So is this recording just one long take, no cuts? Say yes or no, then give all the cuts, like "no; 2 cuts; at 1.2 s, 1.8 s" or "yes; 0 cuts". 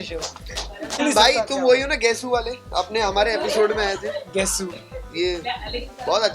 no; 1 cut; at 1.0 s